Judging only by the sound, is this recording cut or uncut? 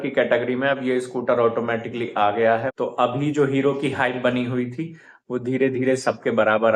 cut